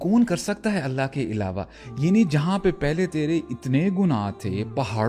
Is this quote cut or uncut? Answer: uncut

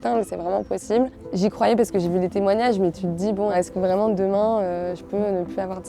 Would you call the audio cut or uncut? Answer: cut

